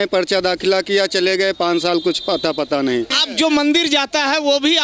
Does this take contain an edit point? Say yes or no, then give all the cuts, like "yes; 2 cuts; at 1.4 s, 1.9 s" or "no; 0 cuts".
yes; 1 cut; at 3.2 s